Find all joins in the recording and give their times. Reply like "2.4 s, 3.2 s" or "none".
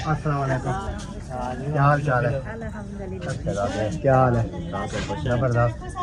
3.3 s

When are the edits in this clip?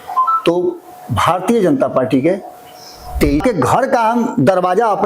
3.4 s

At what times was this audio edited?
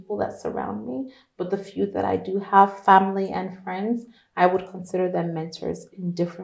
none

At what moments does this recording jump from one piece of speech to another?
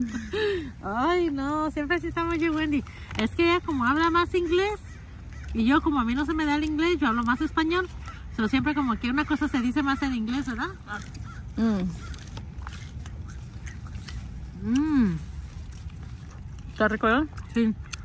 10.8 s

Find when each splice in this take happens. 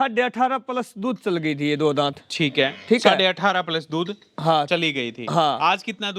none

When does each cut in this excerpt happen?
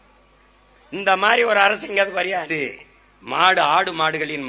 2.5 s

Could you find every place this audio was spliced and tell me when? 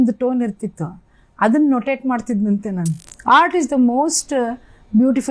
3.0 s

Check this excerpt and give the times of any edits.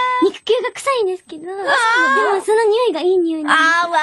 none

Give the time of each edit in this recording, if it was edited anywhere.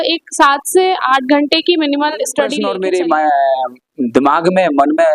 2.6 s

